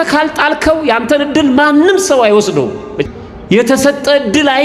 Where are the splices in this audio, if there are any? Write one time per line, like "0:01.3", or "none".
0:03.0